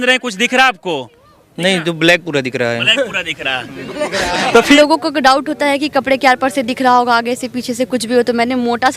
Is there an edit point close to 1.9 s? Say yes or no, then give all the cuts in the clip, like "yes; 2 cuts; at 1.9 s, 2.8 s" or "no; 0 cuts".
no; 1 cut; at 4.8 s